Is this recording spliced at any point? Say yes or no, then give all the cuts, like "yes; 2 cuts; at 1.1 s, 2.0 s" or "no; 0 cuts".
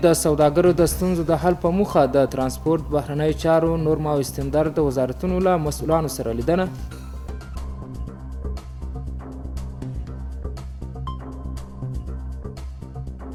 no; 0 cuts